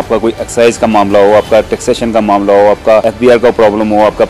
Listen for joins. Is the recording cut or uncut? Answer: cut